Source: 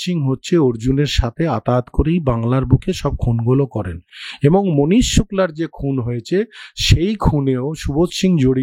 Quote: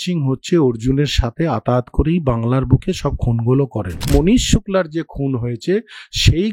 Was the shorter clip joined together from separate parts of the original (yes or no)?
yes